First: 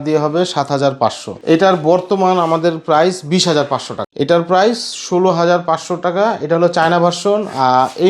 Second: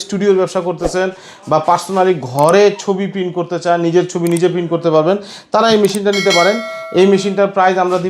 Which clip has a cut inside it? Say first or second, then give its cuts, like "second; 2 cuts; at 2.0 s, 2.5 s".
first; 2 cuts; at 1.3 s, 4.0 s